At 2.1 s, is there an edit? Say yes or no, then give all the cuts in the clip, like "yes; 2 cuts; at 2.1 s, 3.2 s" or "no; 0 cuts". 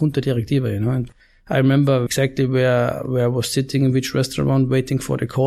yes; 2 cuts; at 1.1 s, 2.1 s